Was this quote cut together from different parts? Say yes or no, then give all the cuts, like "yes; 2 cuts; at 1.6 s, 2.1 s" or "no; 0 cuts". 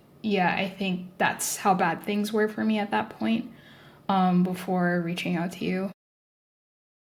no; 0 cuts